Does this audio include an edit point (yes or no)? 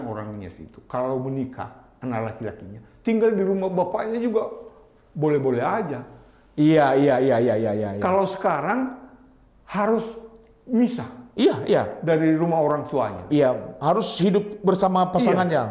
no